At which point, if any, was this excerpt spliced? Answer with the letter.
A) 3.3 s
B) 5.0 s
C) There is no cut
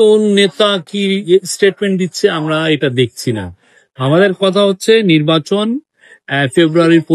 C